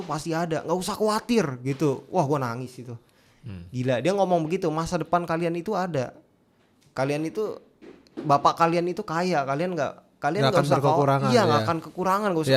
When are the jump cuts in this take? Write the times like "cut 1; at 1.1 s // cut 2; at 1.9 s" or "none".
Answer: none